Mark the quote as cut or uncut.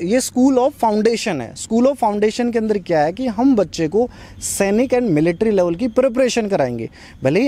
uncut